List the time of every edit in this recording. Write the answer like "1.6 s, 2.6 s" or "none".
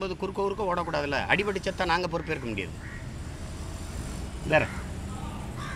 none